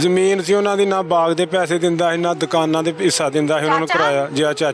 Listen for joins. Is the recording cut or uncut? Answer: uncut